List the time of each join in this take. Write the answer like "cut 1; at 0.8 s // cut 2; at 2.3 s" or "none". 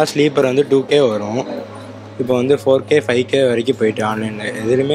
none